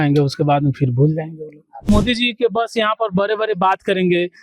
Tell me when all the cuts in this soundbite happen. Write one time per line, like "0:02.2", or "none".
0:01.9